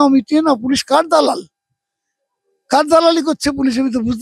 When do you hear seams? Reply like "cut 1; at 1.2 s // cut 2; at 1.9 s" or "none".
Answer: none